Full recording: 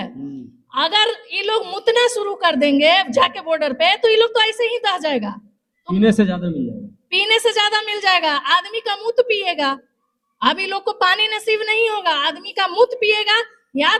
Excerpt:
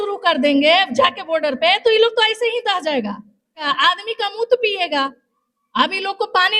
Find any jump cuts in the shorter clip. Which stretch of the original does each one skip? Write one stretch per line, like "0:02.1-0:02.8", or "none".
0:05.8-0:08.3